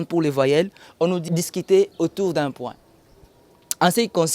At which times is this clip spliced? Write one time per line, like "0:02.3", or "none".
0:01.2